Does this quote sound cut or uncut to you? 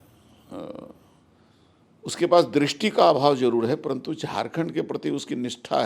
uncut